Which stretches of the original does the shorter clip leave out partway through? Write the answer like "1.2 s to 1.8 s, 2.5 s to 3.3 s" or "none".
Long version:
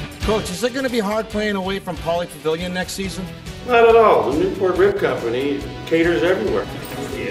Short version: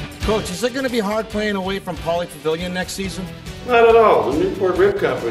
none